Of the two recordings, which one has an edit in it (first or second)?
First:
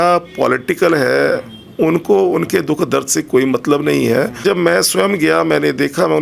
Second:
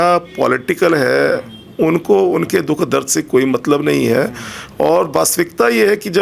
first